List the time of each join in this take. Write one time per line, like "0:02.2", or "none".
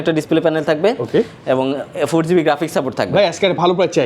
none